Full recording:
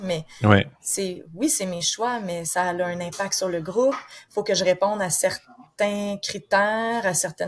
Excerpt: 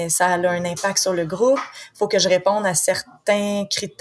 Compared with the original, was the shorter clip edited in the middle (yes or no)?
yes